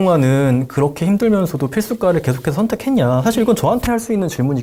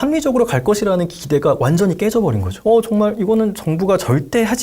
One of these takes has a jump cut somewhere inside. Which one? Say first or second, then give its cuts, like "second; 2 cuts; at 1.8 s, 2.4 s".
second; 1 cut; at 2.5 s